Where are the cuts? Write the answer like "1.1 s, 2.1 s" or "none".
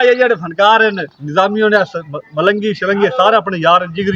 none